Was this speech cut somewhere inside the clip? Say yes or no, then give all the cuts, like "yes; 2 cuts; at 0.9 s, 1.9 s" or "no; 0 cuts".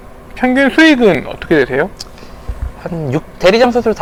no; 0 cuts